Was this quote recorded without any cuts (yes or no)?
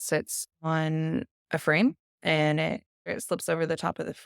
no